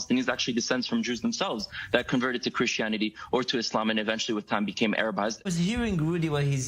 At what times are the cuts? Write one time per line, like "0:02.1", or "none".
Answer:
0:05.4